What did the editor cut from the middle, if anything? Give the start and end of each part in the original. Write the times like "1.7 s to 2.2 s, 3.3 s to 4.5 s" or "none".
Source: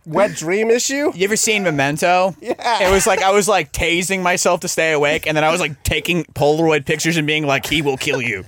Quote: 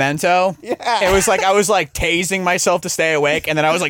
none